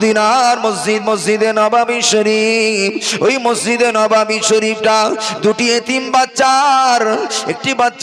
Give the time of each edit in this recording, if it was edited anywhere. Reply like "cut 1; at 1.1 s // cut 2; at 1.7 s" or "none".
none